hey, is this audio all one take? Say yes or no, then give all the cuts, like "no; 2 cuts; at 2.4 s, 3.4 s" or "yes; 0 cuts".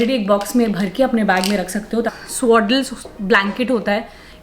no; 1 cut; at 2.1 s